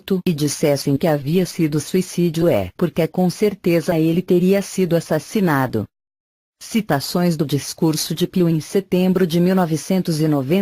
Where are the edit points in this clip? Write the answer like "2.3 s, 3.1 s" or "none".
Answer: 9.4 s

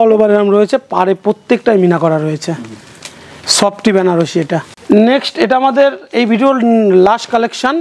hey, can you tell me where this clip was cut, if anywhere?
none

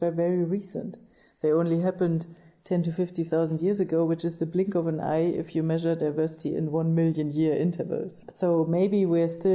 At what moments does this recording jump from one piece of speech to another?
8.2 s

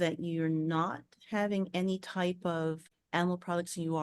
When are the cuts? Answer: 2.9 s

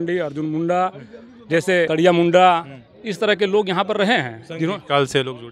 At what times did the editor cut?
none

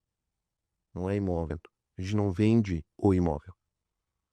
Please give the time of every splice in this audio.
1.5 s

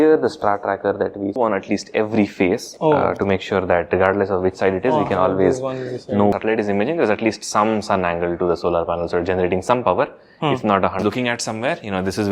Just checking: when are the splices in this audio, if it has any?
1.4 s, 6.3 s, 11.0 s

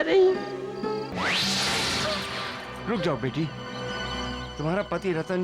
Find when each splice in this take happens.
1.1 s

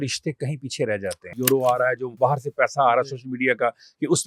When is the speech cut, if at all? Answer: 1.3 s, 2.1 s

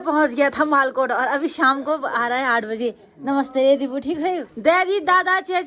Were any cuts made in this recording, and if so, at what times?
4.5 s

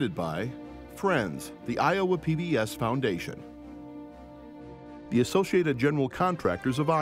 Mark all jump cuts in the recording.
none

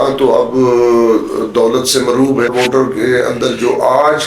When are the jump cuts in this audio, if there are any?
2.5 s

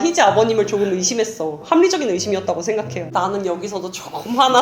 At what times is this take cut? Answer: 3.1 s

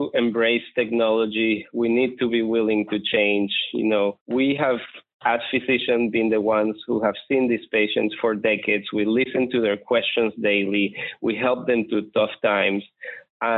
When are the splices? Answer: 4.2 s

